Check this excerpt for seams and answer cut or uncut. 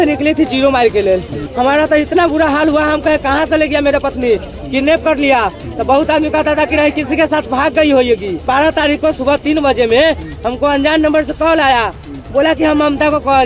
cut